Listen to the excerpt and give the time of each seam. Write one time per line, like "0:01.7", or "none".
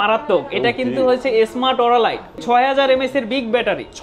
0:02.4